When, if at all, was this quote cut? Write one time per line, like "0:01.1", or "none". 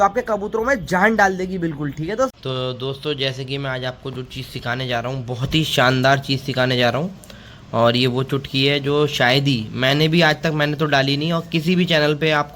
0:02.3